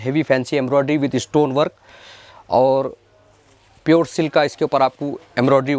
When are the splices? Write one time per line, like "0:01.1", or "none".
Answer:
none